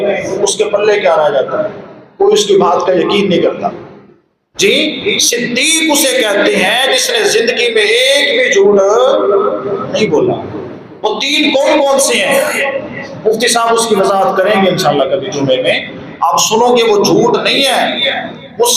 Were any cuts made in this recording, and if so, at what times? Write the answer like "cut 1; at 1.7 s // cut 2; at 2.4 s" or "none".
none